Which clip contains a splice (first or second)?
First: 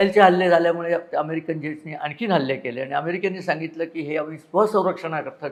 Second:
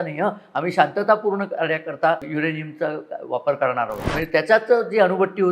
second